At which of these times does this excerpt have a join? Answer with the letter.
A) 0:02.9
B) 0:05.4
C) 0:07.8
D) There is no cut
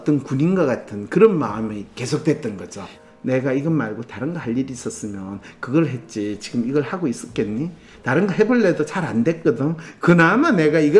A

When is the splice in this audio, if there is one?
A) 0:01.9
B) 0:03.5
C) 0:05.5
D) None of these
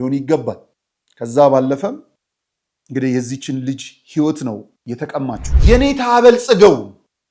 C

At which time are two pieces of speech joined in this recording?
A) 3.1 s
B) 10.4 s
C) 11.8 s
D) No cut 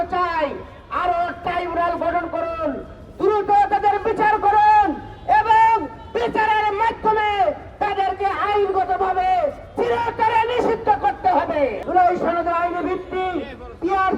C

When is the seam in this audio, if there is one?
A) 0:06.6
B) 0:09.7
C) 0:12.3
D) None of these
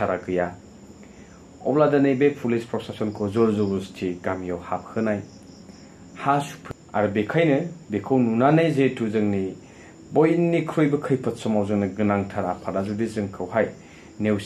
A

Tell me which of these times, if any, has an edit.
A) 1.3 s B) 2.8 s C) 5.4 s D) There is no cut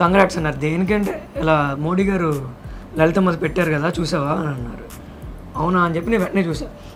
D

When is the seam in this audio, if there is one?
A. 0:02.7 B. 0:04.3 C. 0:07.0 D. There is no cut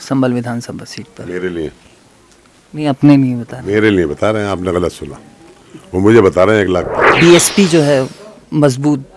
C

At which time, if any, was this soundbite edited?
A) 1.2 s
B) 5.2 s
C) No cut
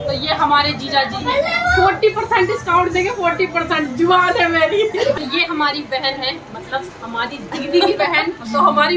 B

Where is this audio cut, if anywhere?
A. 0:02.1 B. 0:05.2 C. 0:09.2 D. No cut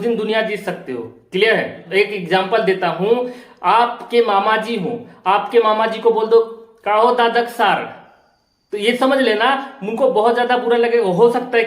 A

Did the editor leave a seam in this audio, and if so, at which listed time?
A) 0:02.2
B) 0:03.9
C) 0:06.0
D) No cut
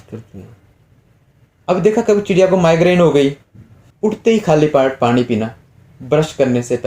B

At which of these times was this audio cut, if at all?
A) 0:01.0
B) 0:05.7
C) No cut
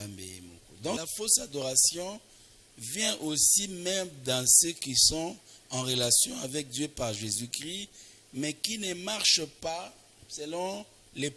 A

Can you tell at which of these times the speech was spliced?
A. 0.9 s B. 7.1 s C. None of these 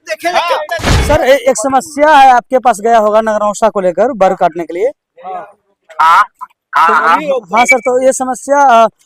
A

